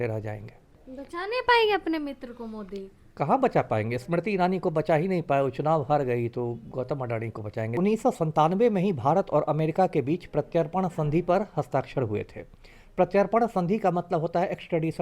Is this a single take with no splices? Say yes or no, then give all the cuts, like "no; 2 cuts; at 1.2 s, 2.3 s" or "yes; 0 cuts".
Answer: no; 1 cut; at 7.8 s